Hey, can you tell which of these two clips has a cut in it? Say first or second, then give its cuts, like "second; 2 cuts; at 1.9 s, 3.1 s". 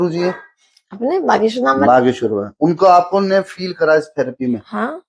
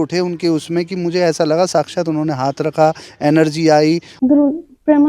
second; 1 cut; at 4.1 s